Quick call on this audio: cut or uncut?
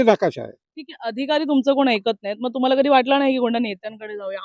uncut